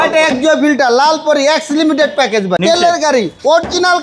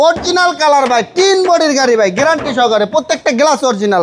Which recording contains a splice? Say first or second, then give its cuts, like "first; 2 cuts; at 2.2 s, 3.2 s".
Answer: first; 1 cut; at 2.6 s